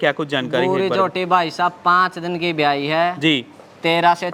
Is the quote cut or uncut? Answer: uncut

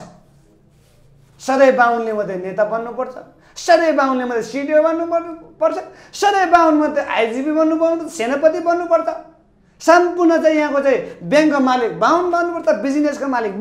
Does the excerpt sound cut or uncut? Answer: uncut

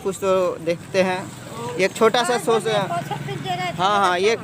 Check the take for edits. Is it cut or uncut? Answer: uncut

